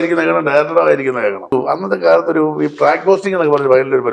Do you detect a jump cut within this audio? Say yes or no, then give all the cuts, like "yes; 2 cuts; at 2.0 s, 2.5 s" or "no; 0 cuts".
yes; 1 cut; at 1.5 s